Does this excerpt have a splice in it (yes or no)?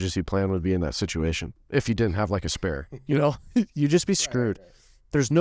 no